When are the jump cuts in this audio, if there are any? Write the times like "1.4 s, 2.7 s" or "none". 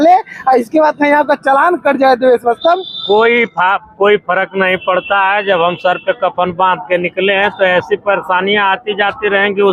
none